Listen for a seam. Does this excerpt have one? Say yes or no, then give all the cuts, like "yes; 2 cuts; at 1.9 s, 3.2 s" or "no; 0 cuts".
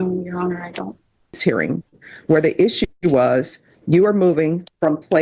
yes; 1 cut; at 1.4 s